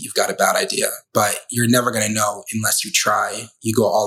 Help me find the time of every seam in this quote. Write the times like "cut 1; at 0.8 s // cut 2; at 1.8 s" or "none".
cut 1; at 1.0 s